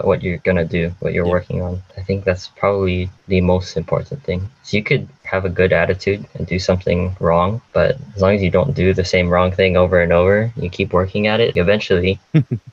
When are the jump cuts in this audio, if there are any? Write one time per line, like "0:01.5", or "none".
0:01.0
0:11.5